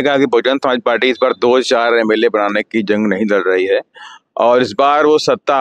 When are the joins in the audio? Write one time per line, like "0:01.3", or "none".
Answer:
none